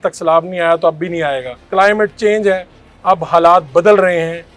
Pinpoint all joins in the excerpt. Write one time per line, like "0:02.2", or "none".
0:01.5